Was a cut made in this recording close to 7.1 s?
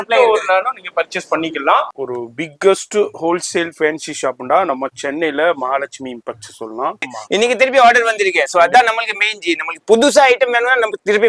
yes; 2 cuts; at 2.0 s, 7.1 s

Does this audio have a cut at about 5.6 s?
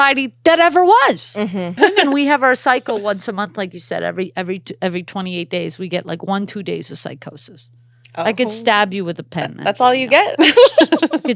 no; 1 cut; at 1.8 s

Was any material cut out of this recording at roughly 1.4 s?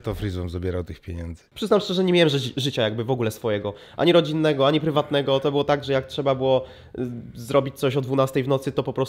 yes; 1 cut; at 1.4 s

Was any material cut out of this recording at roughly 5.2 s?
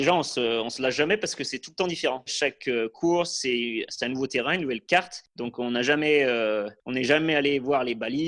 yes; 2 cuts; at 2.3 s, 5.2 s

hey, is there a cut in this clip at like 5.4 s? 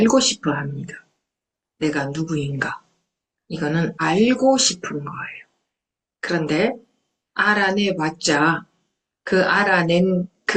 no; 1 cut; at 4.0 s

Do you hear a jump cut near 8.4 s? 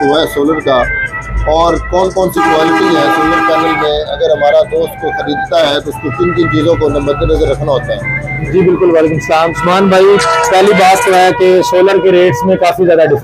no; 0 cuts

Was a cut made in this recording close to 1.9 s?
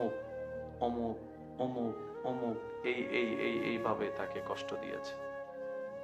no; 1 cut; at 4.6 s

